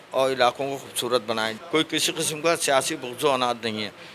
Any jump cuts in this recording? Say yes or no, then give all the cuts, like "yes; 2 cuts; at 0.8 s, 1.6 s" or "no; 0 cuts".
yes; 1 cut; at 1.5 s